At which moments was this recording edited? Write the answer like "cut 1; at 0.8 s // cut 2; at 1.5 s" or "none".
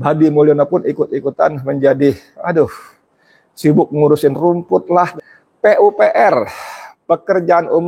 cut 1; at 5.1 s

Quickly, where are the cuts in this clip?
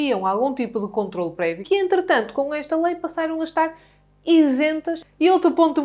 cut 1; at 1.6 s // cut 2; at 5.0 s

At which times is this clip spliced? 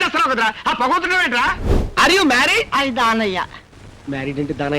cut 1; at 1.6 s

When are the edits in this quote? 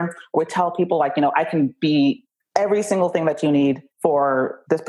cut 1; at 2.4 s

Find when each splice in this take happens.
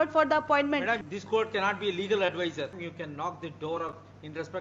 cut 1; at 1.0 s // cut 2; at 2.7 s

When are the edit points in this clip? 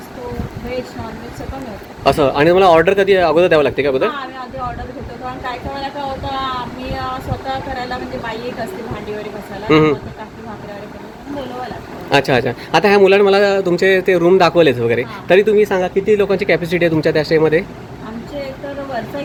none

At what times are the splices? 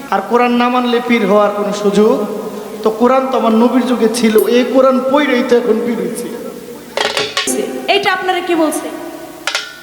cut 1; at 7.5 s

